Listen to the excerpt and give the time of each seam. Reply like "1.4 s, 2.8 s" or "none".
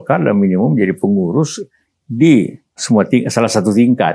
2.8 s